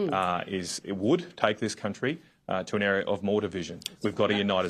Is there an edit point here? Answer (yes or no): no